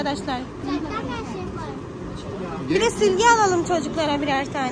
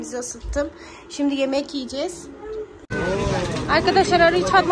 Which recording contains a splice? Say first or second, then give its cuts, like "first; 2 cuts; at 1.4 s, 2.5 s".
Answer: second; 1 cut; at 2.9 s